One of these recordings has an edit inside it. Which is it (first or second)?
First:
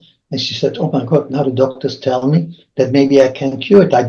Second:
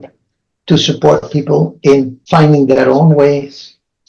second